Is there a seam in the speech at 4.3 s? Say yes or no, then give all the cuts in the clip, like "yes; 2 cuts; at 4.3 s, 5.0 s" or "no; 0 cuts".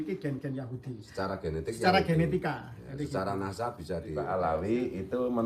yes; 1 cut; at 4.3 s